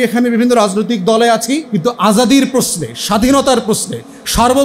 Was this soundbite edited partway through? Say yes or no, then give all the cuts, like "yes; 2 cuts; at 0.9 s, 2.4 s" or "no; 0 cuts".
yes; 1 cut; at 1.7 s